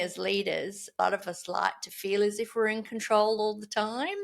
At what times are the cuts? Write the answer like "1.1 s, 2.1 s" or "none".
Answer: 1.0 s